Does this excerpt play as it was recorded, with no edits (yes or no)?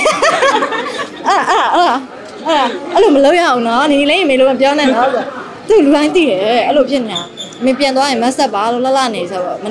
yes